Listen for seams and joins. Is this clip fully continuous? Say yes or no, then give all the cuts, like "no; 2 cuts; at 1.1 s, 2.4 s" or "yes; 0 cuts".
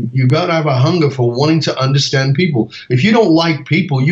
yes; 0 cuts